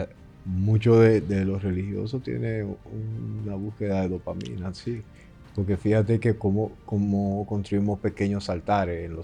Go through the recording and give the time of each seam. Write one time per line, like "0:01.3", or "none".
none

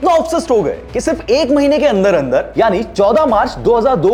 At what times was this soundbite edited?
none

